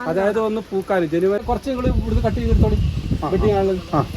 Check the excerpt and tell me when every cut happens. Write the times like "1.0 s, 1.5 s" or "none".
1.4 s